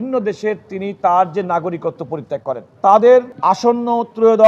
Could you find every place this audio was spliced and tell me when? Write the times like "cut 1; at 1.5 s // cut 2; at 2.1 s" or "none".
cut 1; at 2.6 s // cut 2; at 3.3 s

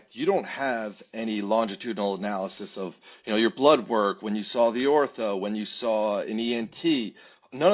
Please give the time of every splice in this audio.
none

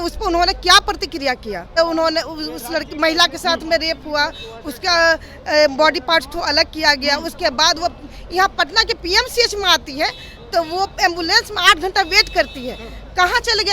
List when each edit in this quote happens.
cut 1; at 1.8 s

